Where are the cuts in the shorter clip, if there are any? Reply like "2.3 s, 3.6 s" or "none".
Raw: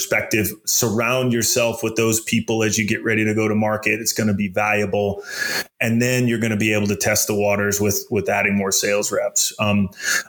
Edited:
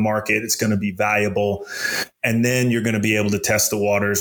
none